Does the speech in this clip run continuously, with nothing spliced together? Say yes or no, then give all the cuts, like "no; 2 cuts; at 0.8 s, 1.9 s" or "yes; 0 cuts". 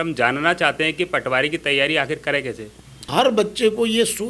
no; 1 cut; at 3.1 s